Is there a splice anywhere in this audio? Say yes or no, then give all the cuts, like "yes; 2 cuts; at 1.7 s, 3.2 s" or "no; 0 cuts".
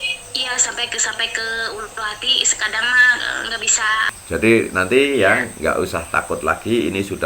yes; 1 cut; at 4.2 s